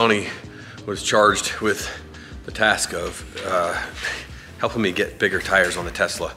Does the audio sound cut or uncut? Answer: uncut